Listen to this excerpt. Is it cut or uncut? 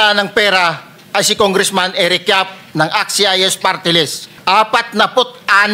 cut